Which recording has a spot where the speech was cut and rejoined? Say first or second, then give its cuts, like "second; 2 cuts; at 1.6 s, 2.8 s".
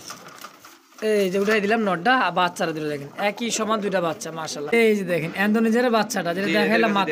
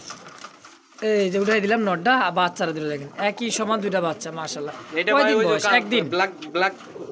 first; 1 cut; at 4.7 s